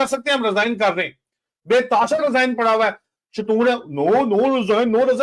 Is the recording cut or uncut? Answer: uncut